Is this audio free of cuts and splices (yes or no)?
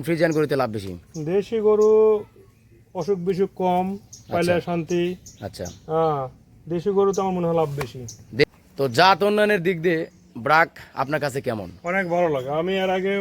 no